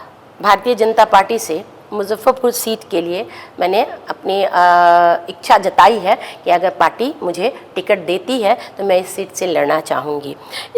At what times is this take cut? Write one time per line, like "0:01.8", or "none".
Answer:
none